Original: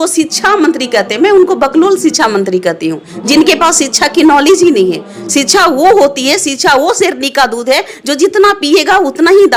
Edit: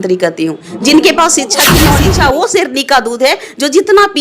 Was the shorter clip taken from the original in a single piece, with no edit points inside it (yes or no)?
no